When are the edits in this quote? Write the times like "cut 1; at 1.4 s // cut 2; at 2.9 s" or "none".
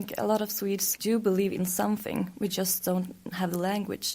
cut 1; at 0.9 s

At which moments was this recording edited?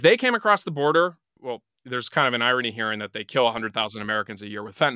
cut 1; at 1.3 s

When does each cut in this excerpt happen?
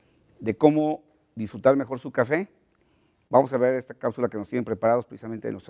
cut 1; at 1.9 s

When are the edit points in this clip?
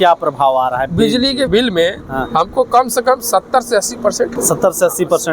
cut 1; at 1.5 s // cut 2; at 4.4 s

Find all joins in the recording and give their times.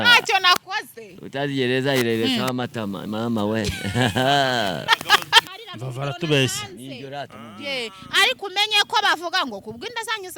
cut 1; at 5.5 s

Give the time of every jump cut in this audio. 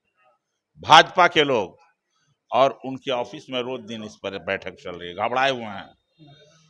none

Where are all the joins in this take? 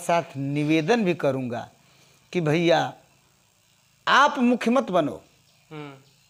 none

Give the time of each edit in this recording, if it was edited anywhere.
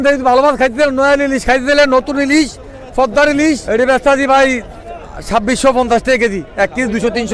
cut 1; at 3.6 s

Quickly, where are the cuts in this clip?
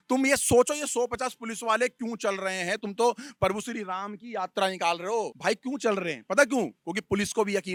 none

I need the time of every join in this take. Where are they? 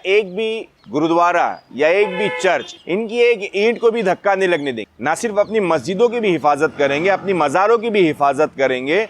cut 1; at 4.9 s

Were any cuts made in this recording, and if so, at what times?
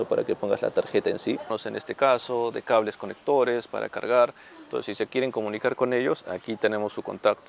cut 1; at 1.5 s

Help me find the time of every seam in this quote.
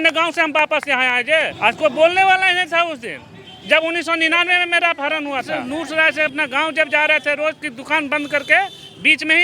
cut 1; at 1.5 s // cut 2; at 5.6 s

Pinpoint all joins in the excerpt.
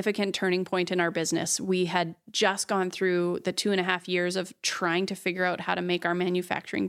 none

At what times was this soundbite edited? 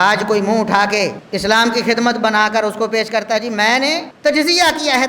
cut 1; at 1.2 s // cut 2; at 4.1 s

